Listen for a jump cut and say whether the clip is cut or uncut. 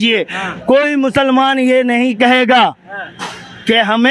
uncut